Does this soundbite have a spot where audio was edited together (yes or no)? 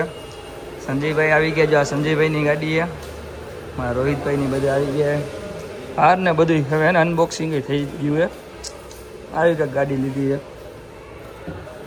no